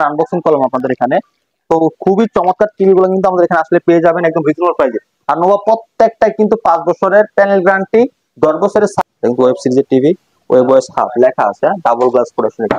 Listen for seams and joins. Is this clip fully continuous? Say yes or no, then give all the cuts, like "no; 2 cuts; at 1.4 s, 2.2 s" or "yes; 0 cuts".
no; 1 cut; at 8.9 s